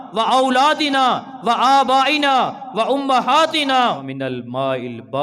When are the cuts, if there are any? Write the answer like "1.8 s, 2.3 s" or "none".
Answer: 4.0 s

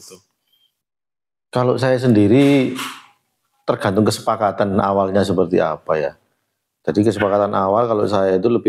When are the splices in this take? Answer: none

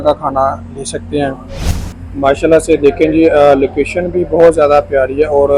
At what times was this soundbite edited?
1.7 s

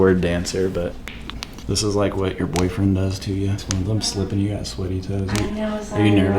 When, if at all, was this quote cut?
1.1 s, 3.6 s

